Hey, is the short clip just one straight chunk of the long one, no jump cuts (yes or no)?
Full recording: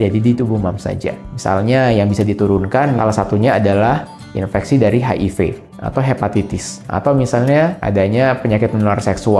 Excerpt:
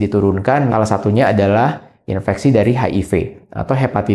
yes